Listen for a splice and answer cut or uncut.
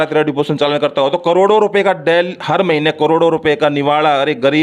uncut